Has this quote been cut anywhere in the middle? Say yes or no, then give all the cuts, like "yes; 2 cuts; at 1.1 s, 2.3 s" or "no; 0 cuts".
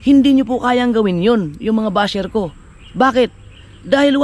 no; 0 cuts